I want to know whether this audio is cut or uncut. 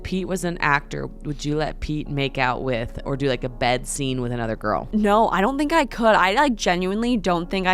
cut